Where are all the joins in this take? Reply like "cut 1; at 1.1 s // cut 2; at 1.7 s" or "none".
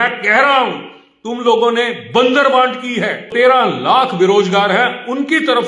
cut 1; at 3.3 s